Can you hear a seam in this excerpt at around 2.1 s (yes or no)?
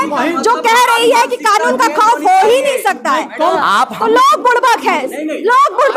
no